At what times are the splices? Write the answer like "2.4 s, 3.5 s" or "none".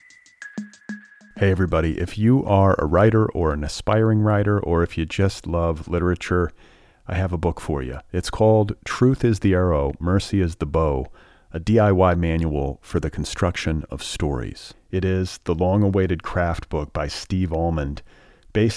1.0 s